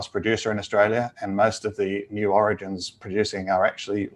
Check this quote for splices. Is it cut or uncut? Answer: uncut